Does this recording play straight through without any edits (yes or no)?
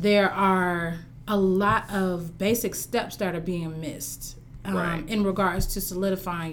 yes